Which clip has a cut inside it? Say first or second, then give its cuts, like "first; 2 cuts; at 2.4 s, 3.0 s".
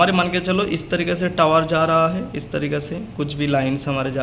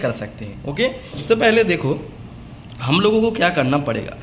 second; 1 cut; at 1.2 s